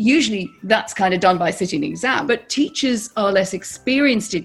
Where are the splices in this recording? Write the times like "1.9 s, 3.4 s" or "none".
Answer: 2.2 s

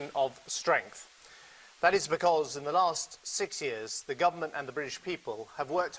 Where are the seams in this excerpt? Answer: 2.5 s

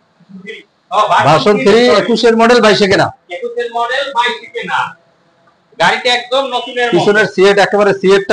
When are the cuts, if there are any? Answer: none

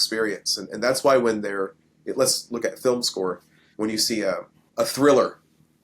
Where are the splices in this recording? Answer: 4.6 s

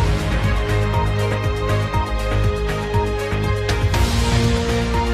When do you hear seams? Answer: 3.8 s

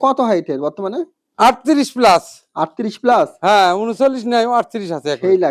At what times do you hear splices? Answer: none

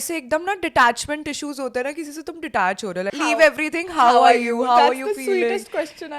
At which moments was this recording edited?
3.1 s

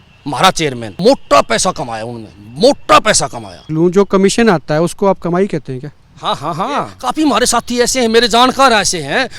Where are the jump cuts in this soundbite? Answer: 1.0 s, 3.6 s, 7.0 s

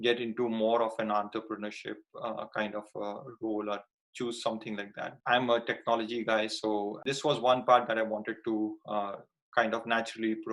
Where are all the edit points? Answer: 5.1 s, 7.0 s

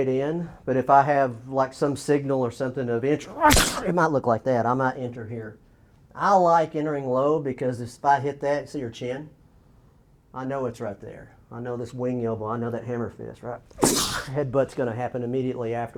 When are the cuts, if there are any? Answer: none

